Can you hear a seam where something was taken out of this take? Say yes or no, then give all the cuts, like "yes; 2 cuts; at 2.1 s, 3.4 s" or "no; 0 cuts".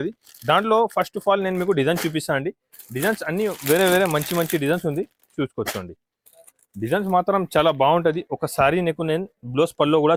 no; 0 cuts